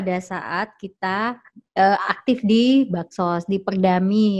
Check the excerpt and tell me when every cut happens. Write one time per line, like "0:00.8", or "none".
none

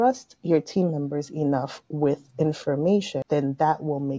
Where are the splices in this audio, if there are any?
0:03.2

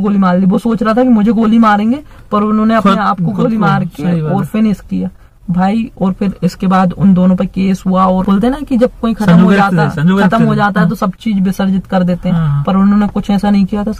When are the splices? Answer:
0:08.2

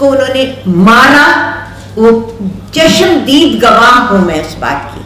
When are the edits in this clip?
none

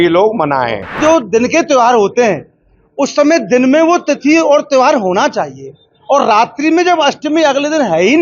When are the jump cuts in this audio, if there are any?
0:01.0

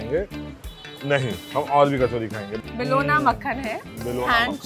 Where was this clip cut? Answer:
0:02.5

